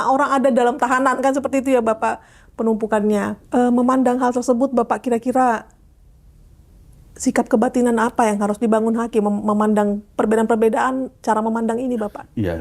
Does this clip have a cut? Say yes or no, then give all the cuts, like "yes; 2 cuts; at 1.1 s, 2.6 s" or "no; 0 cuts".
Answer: no; 0 cuts